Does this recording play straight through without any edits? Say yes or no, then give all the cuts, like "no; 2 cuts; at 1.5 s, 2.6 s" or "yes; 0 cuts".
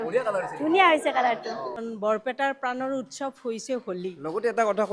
no; 1 cut; at 1.8 s